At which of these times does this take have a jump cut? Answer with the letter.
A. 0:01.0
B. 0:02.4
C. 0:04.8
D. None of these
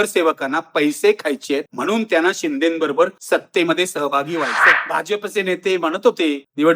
C